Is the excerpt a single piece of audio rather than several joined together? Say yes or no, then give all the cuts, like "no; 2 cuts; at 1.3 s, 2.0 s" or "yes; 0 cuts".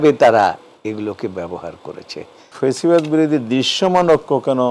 no; 1 cut; at 2.4 s